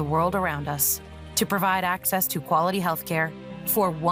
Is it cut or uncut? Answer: uncut